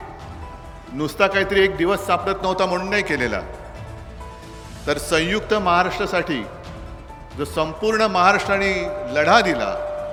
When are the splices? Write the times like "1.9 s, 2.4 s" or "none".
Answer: none